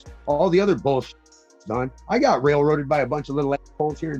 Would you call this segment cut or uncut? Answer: uncut